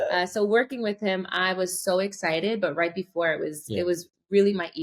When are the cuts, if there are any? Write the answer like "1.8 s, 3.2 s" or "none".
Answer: none